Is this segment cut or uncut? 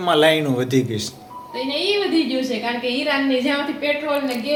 uncut